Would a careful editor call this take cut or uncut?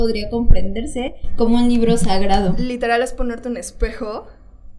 cut